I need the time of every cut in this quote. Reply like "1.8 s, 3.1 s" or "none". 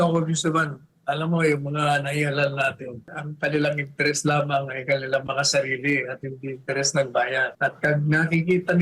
3.2 s, 7.5 s